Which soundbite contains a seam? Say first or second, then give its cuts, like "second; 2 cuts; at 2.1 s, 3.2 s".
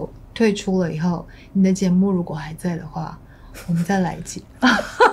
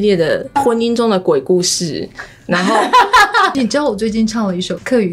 second; 1 cut; at 3.5 s